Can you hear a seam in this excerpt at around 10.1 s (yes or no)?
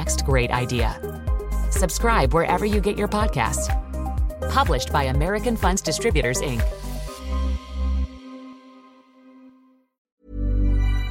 yes